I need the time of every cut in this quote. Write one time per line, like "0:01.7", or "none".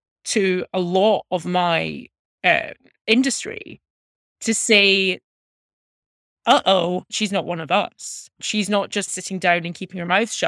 0:07.1
0:09.1